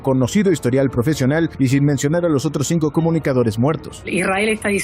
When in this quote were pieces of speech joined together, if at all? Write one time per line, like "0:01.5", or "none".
0:03.9